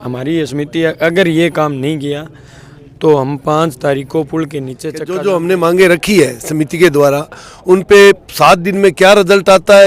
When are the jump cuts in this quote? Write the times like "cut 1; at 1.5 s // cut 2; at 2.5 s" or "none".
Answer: cut 1; at 5.1 s